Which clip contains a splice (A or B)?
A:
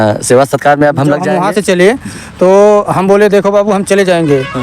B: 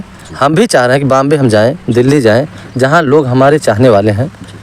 A